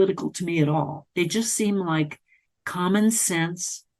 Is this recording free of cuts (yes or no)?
yes